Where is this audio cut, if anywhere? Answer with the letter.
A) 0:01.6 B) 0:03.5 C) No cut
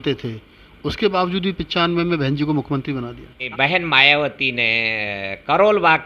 B